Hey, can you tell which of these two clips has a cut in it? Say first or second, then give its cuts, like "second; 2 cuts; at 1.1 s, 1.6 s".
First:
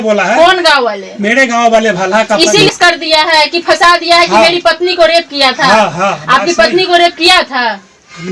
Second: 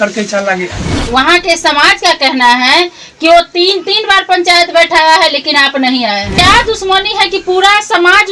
second; 2 cuts; at 0.9 s, 6.3 s